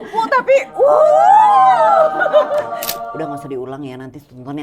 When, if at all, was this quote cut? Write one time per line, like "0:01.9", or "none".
0:03.1